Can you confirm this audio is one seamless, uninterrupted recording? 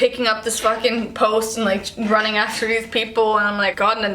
yes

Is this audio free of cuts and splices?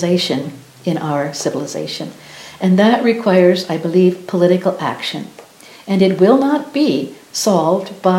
yes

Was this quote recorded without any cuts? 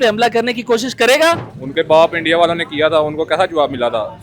no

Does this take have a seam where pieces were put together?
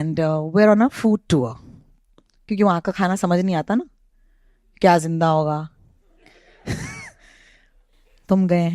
no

